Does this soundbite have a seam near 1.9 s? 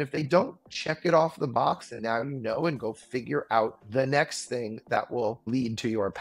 no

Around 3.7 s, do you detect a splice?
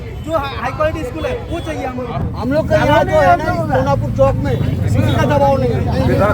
no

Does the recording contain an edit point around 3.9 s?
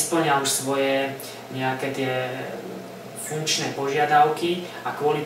no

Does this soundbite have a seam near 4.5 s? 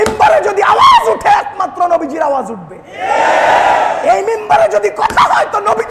no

